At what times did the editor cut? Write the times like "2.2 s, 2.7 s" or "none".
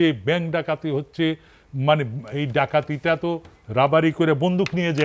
none